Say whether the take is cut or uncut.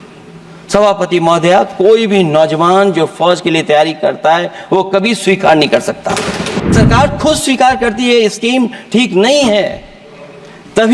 cut